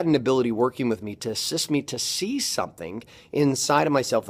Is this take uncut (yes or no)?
yes